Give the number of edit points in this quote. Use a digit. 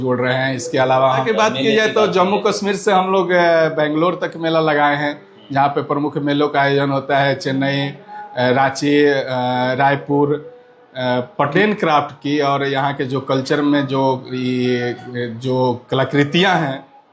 2